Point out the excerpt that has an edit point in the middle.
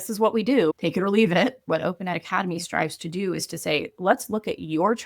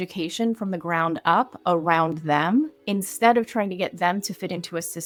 first; 1 cut; at 1.6 s

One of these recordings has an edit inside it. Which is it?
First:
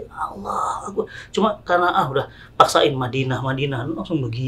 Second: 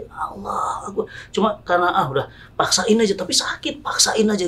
second; 1 cut; at 2.4 s

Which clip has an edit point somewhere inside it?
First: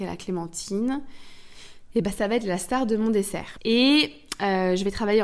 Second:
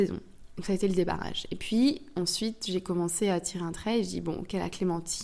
first; 1 cut; at 3.5 s

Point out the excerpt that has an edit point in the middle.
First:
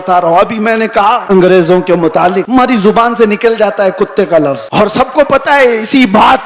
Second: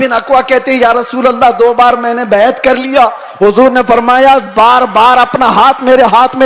first; 3 cuts; at 1.2 s, 2.4 s, 4.6 s

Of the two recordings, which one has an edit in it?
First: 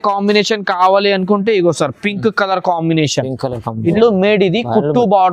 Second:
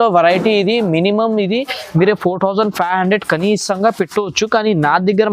first; 1 cut; at 3.8 s

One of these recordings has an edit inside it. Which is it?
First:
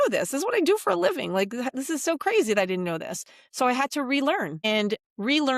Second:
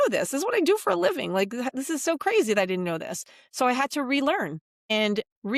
first; 1 cut; at 4.5 s

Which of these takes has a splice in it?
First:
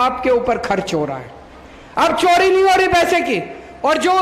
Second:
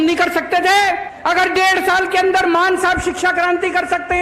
second; 1 cut; at 1.1 s

